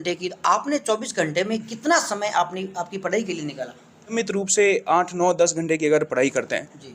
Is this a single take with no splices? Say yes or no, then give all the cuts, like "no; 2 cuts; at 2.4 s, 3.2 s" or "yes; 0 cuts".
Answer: no; 1 cut; at 4.1 s